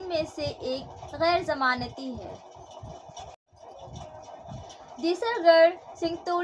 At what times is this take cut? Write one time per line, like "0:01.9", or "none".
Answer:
0:03.5